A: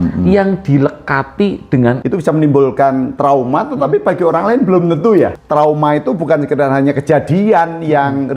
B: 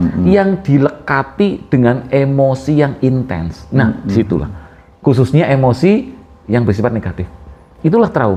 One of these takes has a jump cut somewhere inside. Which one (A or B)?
A